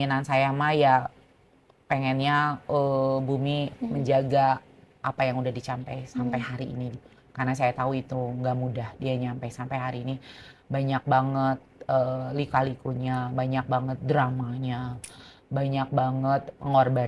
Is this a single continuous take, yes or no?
yes